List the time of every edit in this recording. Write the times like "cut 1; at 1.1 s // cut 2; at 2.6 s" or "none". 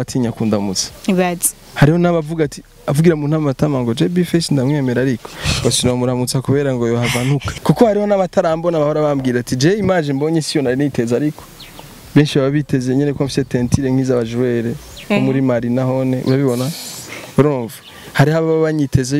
cut 1; at 7.6 s